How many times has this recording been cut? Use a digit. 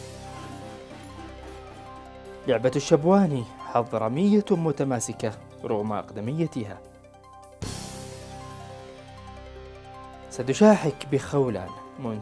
1